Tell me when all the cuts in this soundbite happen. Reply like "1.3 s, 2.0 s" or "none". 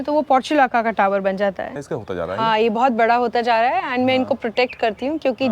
1.7 s

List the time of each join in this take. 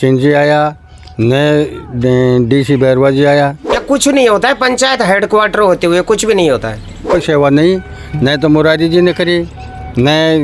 3.8 s, 7.1 s

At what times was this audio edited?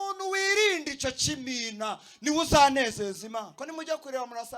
3.5 s

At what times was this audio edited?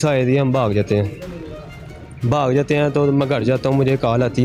none

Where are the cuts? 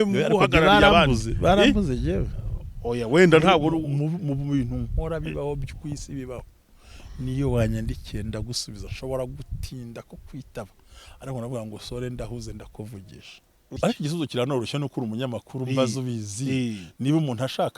13.8 s

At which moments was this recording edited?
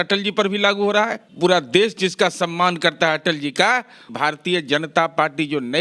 1.2 s, 4.1 s

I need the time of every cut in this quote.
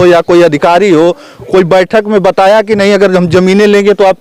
none

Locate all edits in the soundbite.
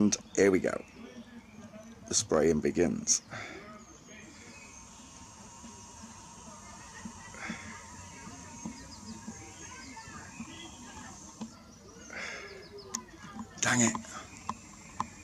8.7 s

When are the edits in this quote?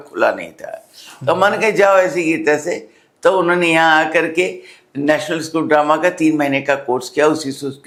none

